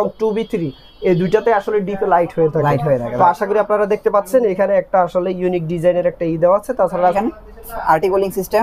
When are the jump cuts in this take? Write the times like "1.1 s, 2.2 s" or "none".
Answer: 7.1 s